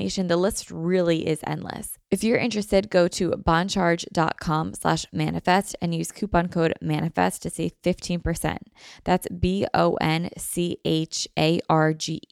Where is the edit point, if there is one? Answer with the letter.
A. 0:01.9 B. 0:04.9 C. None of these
A